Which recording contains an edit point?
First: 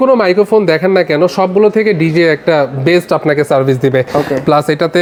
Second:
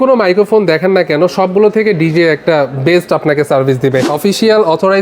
second; 1 cut; at 4.1 s

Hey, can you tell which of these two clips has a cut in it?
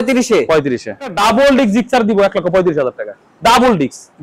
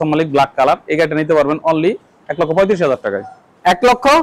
first; 1 cut; at 1.1 s

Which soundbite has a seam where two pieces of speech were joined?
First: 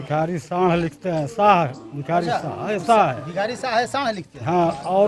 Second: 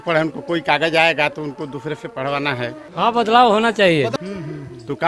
second; 2 cuts; at 2.8 s, 4.1 s

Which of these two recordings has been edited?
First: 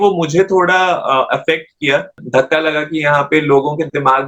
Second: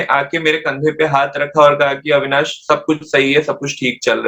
first; 1 cut; at 2.2 s

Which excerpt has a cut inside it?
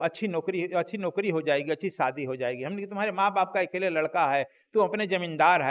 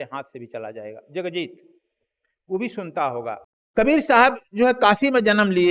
second; 1 cut; at 3.5 s

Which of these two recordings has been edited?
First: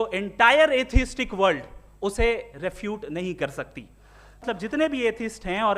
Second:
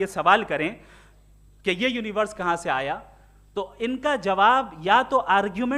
first; 1 cut; at 4.4 s

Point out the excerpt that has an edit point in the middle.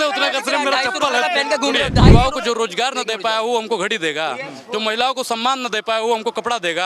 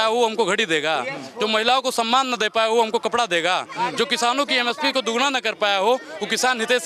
first; 1 cut; at 2.1 s

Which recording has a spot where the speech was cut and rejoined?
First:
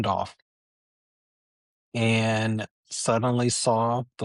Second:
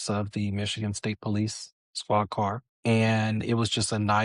second; 1 cut; at 2.7 s

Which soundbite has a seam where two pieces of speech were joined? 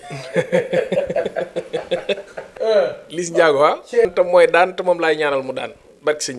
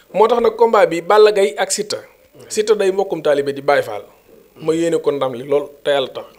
first; 2 cuts; at 2.5 s, 4.0 s

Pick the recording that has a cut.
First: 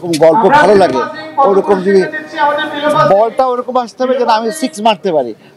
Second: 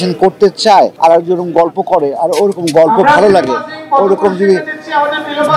second; 1 cut; at 0.9 s

